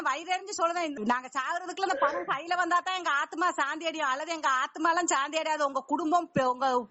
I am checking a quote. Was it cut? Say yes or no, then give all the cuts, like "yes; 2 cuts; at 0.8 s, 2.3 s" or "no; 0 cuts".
yes; 1 cut; at 0.9 s